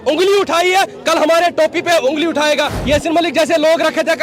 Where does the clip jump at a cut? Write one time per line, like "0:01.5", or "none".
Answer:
0:02.8